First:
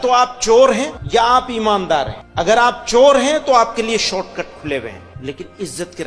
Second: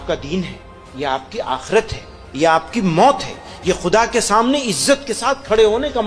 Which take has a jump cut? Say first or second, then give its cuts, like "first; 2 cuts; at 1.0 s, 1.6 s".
first; 3 cuts; at 1.0 s, 2.2 s, 5.1 s